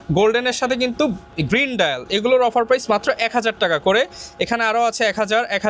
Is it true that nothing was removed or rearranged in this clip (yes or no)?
yes